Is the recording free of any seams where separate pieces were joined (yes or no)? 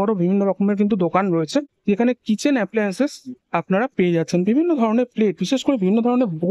no